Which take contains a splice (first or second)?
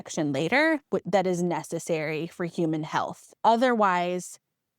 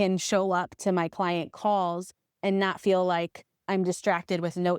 first